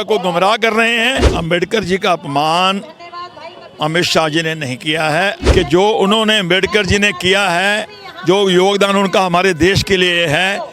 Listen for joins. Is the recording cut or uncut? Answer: cut